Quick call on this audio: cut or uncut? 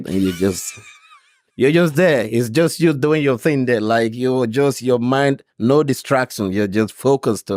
uncut